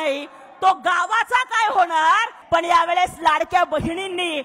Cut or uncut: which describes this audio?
cut